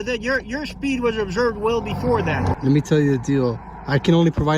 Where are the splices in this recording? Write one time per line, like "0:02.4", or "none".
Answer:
0:02.8